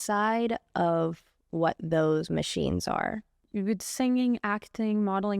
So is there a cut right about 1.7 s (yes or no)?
no